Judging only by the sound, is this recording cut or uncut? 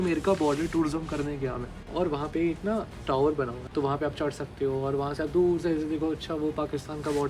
cut